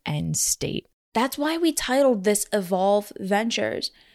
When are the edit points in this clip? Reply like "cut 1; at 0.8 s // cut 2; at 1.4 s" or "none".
cut 1; at 0.9 s